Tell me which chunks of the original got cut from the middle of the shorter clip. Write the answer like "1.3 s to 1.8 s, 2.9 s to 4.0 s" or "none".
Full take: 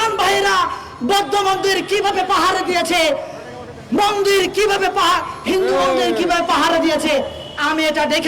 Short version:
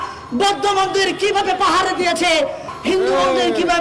3.4 s to 5.3 s